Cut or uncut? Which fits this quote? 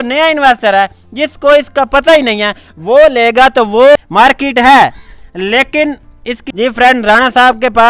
cut